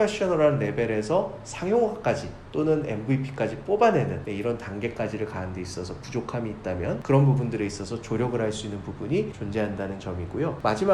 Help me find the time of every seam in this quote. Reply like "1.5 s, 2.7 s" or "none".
none